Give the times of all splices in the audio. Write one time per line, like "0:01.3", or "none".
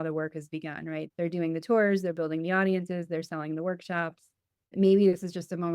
0:04.6